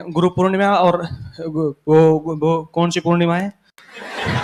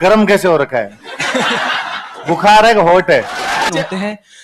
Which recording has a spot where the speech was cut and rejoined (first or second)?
second